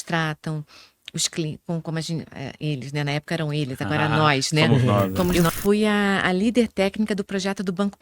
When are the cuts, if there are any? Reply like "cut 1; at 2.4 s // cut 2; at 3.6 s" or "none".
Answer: cut 1; at 5.4 s